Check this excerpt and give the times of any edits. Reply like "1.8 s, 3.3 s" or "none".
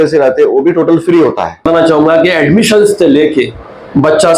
1.7 s